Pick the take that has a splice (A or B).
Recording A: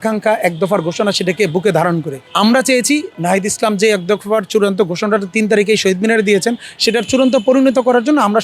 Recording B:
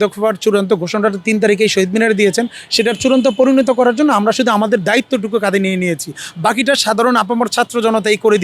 A